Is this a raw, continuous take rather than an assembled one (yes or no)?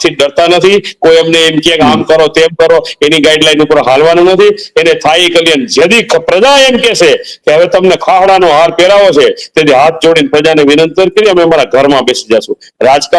yes